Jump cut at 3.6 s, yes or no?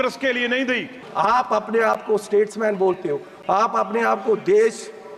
no